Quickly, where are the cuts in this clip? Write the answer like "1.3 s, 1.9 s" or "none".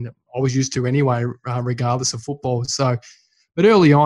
none